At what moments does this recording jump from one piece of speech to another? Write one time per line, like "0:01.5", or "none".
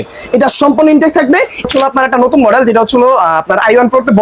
0:01.7

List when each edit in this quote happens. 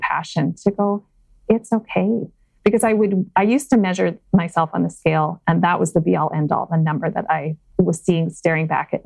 0:07.6

